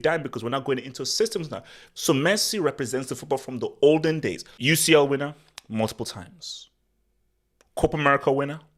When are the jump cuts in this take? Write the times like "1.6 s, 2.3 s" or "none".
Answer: 4.5 s